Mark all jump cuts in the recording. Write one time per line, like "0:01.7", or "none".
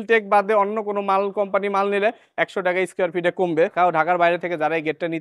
0:03.7